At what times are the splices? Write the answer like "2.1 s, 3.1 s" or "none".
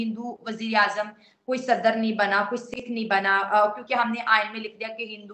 none

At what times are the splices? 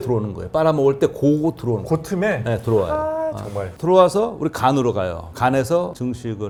none

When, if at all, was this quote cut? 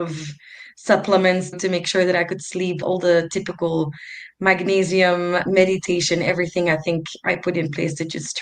1.6 s, 2.8 s, 5.5 s

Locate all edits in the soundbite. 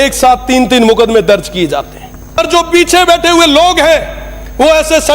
2.4 s

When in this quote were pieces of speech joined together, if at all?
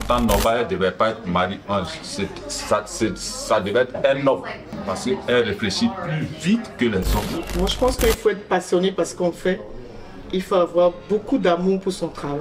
4.7 s, 7.4 s

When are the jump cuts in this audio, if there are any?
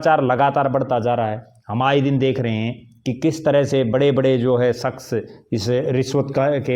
none

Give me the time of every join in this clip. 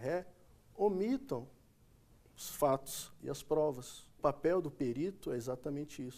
4.2 s

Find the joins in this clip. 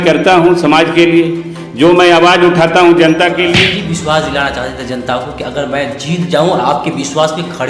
3.6 s

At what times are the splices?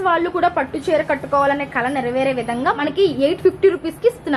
2.8 s

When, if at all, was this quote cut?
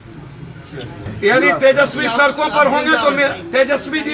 1.1 s

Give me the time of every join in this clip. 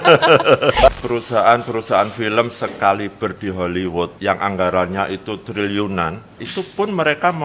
0.9 s, 4.1 s, 6.4 s

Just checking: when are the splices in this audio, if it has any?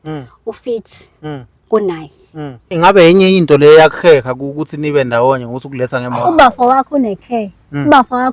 2.7 s

